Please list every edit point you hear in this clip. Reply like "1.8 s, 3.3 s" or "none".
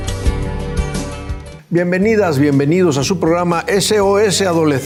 none